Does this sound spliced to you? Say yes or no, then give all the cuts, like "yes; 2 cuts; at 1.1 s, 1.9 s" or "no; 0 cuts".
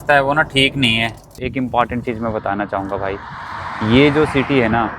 yes; 1 cut; at 1.4 s